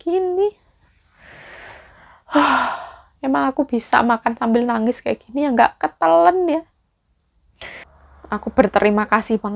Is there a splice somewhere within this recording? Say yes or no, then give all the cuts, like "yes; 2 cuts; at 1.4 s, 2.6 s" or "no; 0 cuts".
yes; 1 cut; at 7.9 s